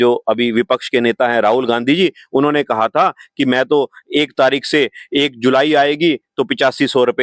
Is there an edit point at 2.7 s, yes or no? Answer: no